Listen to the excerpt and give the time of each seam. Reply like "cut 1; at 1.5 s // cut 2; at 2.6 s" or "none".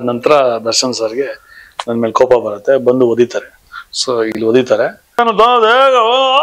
cut 1; at 5.2 s